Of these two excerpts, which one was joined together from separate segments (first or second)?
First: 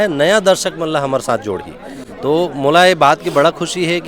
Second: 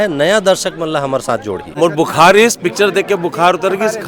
second